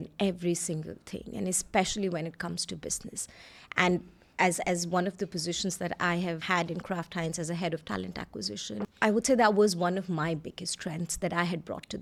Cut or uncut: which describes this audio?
uncut